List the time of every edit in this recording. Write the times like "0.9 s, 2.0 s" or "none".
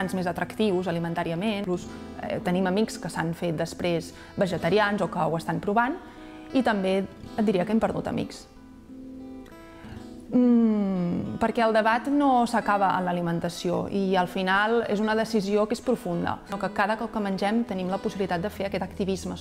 1.6 s, 16.6 s